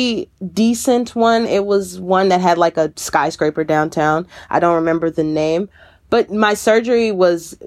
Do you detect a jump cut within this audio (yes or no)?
no